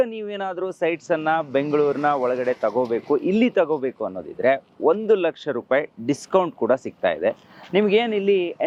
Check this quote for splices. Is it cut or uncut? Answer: uncut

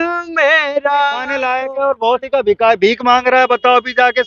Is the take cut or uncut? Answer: cut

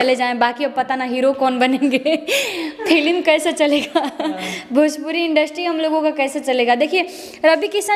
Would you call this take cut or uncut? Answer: uncut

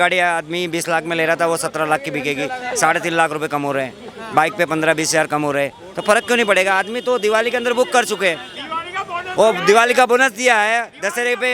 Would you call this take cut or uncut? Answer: uncut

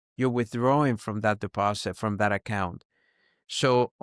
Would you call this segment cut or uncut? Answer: uncut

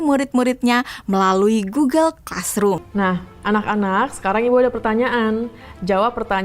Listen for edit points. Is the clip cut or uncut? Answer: cut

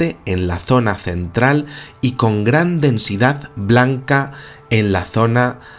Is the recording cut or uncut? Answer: cut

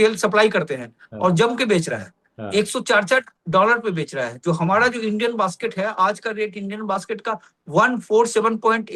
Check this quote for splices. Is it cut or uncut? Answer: uncut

